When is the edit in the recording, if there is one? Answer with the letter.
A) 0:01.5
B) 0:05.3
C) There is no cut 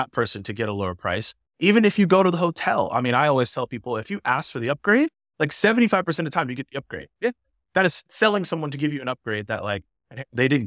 C